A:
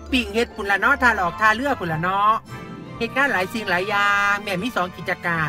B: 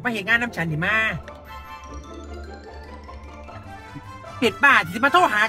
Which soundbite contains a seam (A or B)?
B